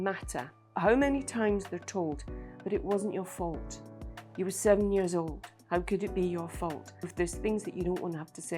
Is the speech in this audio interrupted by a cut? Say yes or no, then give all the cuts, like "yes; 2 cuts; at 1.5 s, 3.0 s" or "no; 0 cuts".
yes; 1 cut; at 7.1 s